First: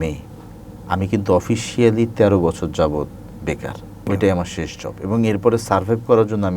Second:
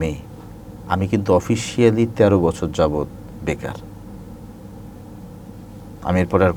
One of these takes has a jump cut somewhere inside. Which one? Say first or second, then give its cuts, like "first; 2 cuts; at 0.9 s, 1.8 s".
first; 1 cut; at 4.1 s